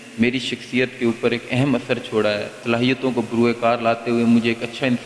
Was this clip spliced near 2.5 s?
yes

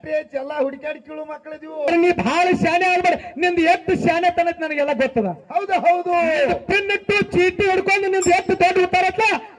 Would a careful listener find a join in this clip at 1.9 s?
yes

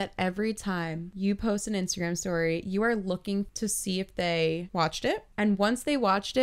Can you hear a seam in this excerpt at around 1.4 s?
no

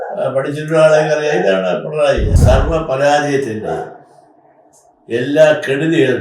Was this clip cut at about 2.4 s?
yes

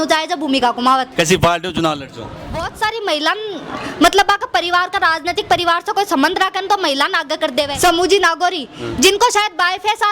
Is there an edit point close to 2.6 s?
yes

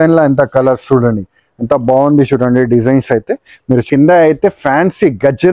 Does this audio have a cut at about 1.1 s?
no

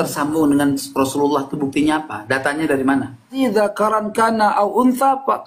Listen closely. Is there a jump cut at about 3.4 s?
yes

